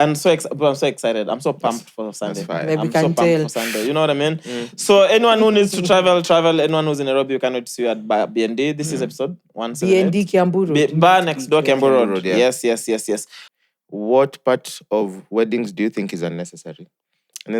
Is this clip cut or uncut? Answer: cut